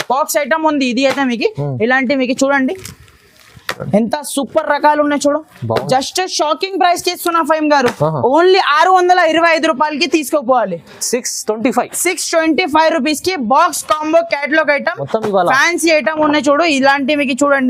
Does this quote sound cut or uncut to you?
uncut